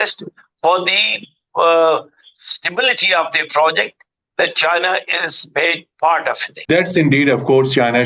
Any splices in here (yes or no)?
no